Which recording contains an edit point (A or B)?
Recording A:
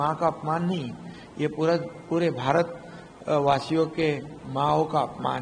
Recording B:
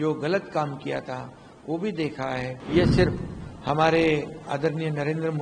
B